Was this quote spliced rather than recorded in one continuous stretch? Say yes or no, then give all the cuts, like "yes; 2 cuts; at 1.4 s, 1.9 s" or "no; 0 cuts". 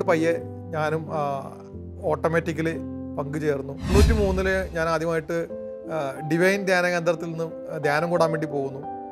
yes; 1 cut; at 3.9 s